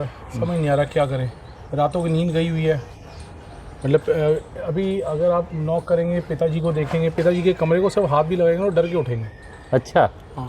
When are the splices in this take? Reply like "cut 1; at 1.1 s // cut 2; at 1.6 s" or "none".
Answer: none